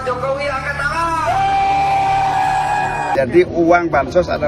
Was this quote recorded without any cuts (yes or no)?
no